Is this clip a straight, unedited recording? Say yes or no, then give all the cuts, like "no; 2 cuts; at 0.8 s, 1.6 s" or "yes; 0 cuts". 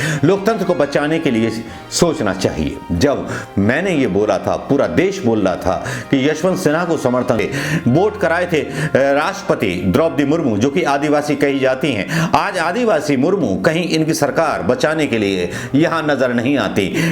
no; 1 cut; at 7.4 s